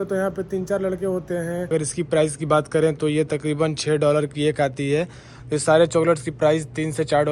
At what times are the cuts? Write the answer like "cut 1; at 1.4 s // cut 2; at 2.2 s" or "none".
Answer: cut 1; at 1.7 s // cut 2; at 5.3 s